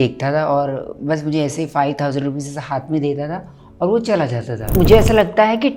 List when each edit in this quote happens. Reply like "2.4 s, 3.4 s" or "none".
4.7 s